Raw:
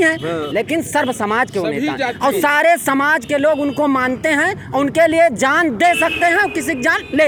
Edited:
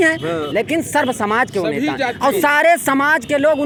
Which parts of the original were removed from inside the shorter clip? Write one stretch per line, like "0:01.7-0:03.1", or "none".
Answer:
none